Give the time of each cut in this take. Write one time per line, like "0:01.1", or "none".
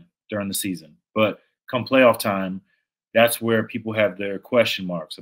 none